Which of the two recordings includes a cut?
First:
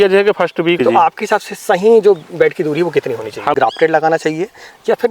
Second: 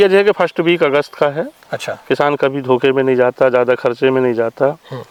first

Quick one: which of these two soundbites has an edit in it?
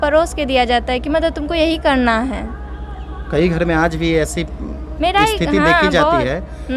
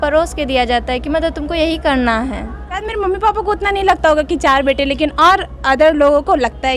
second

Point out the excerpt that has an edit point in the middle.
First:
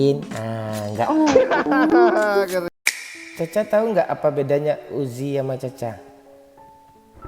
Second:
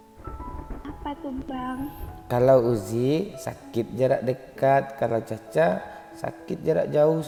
first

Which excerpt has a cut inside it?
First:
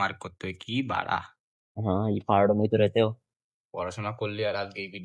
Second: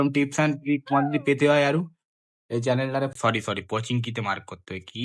second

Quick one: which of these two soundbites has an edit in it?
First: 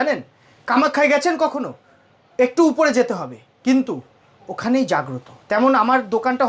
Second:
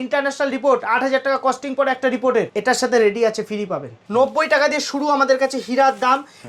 second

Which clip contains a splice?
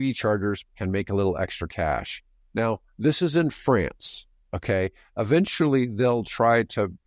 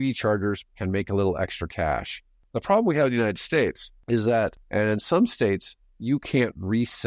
second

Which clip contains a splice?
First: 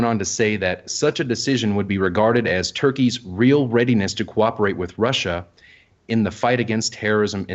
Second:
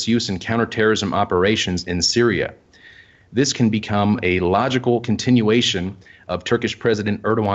first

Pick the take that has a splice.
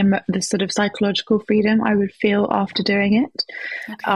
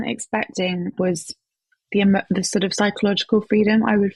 second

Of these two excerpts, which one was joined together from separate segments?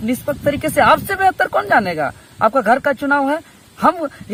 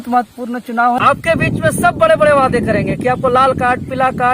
second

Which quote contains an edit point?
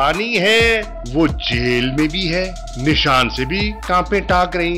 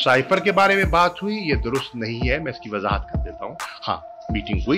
first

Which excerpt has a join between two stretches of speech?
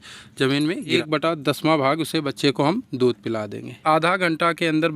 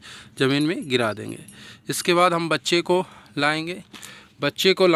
first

